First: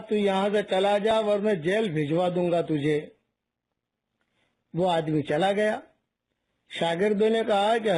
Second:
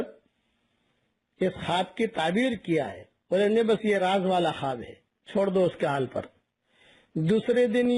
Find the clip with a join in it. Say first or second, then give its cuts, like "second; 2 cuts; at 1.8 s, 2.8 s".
second; 1 cut; at 2.5 s